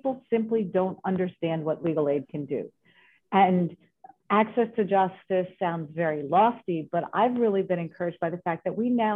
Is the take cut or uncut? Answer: uncut